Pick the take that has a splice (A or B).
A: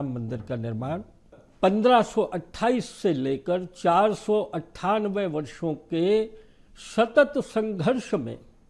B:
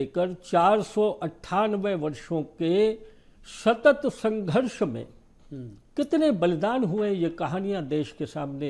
A